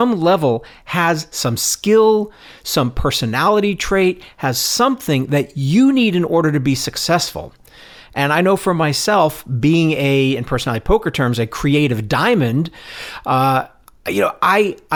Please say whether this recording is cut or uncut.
uncut